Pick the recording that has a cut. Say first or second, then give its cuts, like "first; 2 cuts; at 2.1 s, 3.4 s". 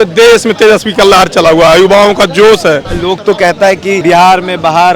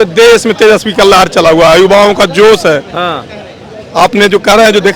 first; 2 cuts; at 2.9 s, 4.0 s